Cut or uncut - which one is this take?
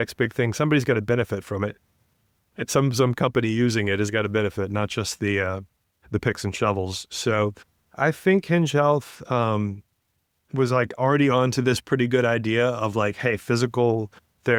uncut